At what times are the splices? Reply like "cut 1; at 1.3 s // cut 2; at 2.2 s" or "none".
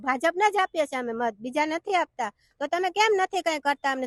none